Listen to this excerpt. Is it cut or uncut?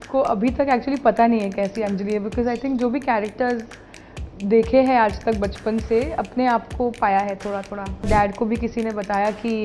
cut